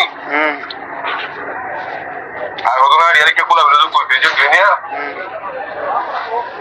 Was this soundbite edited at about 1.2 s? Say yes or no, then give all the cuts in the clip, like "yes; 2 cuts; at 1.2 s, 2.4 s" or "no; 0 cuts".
no; 0 cuts